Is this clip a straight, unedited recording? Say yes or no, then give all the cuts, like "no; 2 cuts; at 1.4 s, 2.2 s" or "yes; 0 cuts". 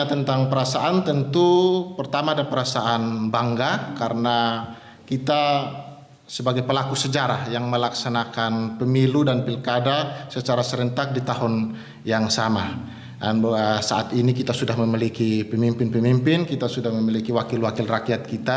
yes; 0 cuts